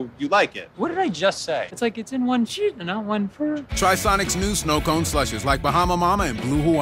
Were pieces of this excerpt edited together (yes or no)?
no